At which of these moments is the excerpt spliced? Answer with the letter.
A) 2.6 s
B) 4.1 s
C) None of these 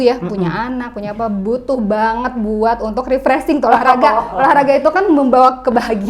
C